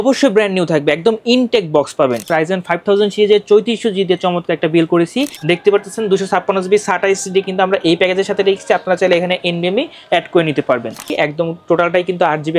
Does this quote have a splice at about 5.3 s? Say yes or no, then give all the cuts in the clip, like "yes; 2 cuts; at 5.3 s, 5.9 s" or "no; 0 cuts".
yes; 3 cuts; at 2.3 s, 5.3 s, 11.1 s